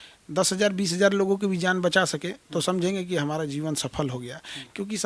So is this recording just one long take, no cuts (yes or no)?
yes